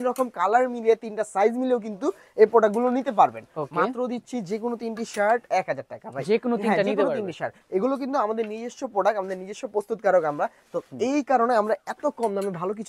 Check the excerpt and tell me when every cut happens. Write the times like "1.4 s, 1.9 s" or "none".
none